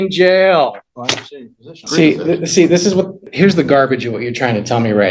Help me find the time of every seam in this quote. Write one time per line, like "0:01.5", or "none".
0:01.8
0:03.2